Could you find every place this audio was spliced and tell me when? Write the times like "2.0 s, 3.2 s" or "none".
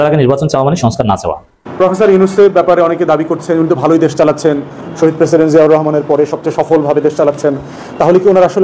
1.6 s